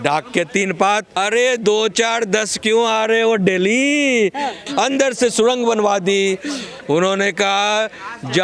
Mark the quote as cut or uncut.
cut